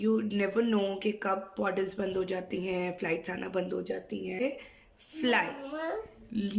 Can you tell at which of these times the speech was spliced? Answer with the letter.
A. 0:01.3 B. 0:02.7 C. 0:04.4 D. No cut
C